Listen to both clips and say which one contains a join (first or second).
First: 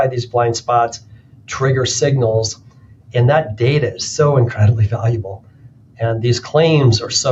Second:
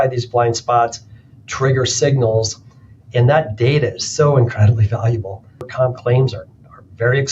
second